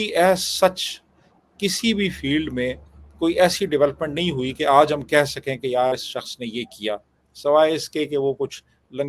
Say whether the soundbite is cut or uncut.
uncut